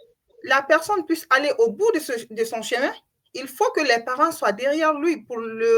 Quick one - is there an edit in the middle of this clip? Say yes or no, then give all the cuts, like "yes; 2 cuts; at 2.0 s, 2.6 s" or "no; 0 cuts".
no; 0 cuts